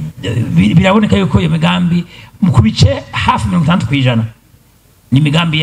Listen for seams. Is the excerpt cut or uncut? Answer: uncut